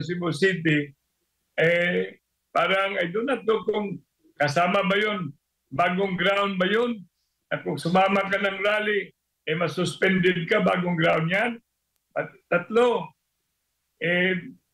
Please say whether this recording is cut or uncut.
uncut